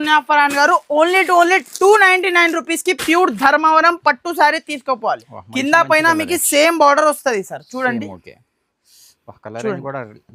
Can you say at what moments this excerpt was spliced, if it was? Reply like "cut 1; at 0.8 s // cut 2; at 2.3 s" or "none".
cut 1; at 5.2 s